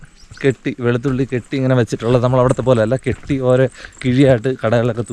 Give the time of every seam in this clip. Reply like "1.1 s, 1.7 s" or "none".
none